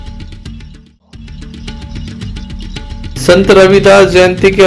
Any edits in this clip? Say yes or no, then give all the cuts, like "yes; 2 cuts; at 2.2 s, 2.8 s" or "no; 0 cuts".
yes; 2 cuts; at 1.4 s, 3.1 s